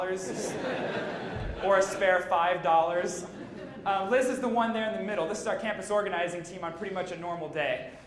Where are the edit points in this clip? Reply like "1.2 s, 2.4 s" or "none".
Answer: 5.6 s